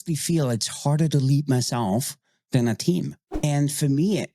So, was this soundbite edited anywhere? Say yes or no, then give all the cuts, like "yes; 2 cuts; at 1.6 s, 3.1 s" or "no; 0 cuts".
yes; 1 cut; at 3.4 s